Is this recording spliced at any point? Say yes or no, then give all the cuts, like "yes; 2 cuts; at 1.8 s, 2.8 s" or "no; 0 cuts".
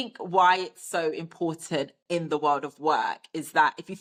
no; 0 cuts